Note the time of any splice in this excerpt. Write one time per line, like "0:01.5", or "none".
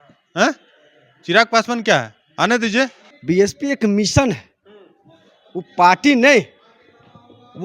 0:03.1